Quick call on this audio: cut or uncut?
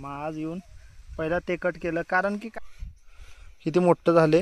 cut